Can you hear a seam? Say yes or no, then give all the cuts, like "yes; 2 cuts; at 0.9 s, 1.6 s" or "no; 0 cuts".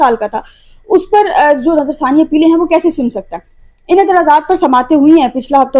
no; 0 cuts